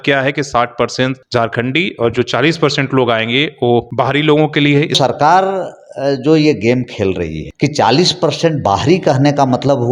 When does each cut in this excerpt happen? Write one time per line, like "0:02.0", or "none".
0:01.2
0:03.9
0:04.9
0:07.4

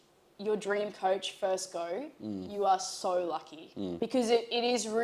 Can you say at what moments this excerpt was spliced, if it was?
0:03.9

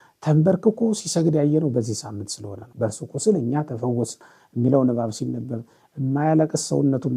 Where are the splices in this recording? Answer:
0:02.6

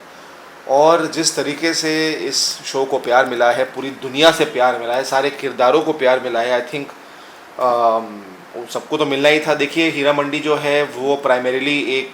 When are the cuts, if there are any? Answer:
none

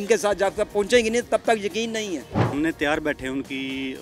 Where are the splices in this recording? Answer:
0:02.5

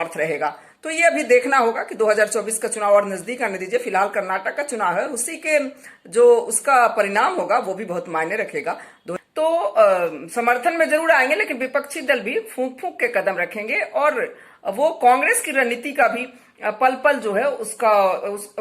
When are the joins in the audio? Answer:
0:08.8

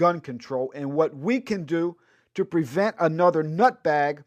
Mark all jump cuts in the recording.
0:02.7

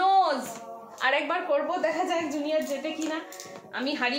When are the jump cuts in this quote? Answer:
none

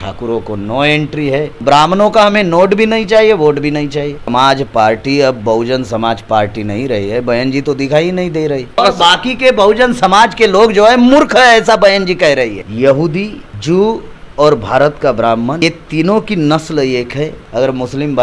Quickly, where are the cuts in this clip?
0:01.6
0:04.3
0:08.8
0:12.6
0:17.4

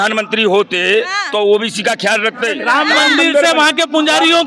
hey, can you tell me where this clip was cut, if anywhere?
0:02.6

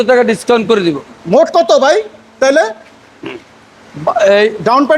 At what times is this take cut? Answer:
none

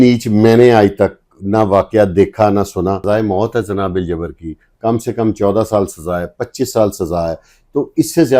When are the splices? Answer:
0:03.0

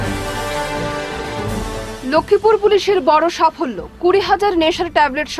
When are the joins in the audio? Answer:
0:01.4

